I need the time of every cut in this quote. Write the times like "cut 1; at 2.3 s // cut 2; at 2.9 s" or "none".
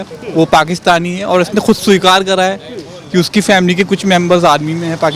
none